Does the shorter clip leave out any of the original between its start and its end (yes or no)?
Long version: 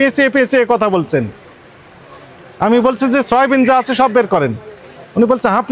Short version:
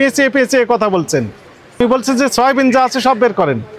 yes